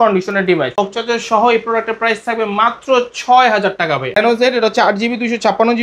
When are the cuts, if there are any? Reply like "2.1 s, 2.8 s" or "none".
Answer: 0.8 s, 4.2 s